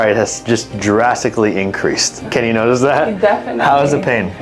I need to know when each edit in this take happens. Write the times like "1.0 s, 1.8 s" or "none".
2.2 s